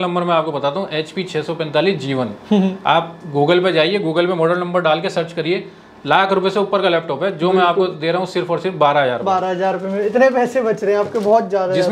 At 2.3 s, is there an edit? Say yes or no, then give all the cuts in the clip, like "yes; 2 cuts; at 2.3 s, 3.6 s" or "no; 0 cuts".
no; 0 cuts